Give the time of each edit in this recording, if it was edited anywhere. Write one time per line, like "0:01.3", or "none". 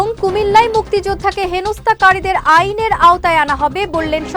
none